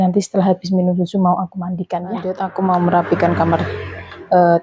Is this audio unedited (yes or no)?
no